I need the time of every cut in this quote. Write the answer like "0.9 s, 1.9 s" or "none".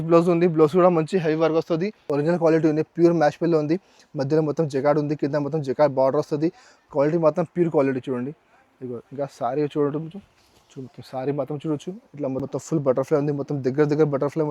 2.0 s, 12.4 s